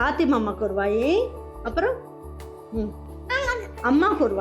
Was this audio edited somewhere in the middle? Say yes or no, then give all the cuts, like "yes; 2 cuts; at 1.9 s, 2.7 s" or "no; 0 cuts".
no; 0 cuts